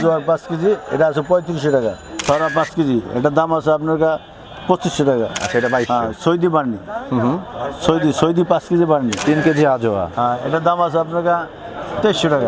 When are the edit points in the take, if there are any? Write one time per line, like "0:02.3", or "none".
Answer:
0:02.2
0:05.4
0:09.2